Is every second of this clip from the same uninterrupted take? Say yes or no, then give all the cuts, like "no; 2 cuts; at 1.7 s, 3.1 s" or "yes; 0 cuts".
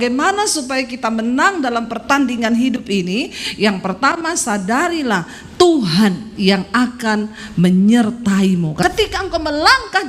no; 1 cut; at 8.8 s